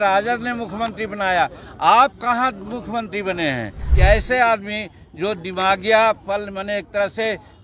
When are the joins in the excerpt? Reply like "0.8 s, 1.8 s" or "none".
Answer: 3.8 s